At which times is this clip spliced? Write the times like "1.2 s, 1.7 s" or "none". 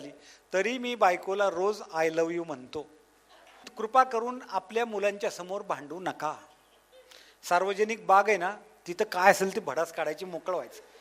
3.7 s